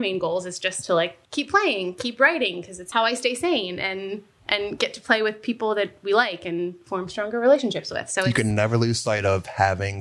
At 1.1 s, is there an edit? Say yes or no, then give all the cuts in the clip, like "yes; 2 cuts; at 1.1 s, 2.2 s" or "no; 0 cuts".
yes; 2 cuts; at 1.1 s, 2.8 s